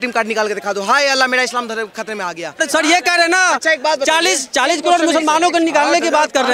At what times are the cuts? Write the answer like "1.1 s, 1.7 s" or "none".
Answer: 2.6 s